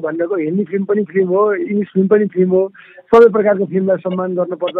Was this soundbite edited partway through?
no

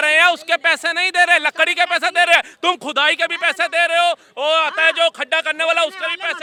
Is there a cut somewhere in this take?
no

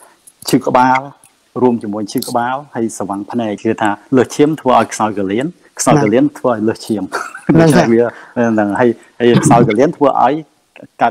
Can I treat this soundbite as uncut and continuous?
no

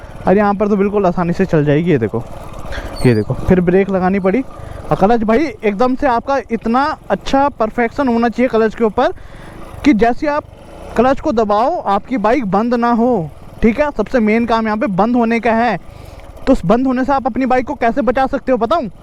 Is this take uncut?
yes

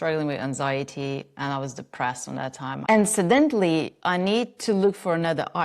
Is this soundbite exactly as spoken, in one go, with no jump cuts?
no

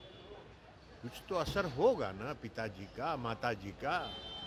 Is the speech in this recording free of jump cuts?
yes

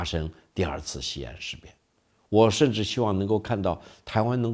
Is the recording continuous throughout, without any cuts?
yes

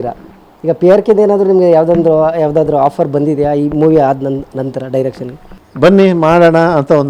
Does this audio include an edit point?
no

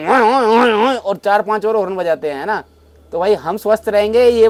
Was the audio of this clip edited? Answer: no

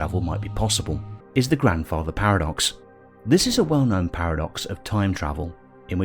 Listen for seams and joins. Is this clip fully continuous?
no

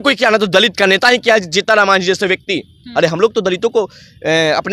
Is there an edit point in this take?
no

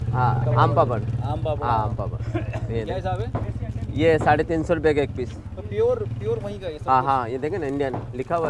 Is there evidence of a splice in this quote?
no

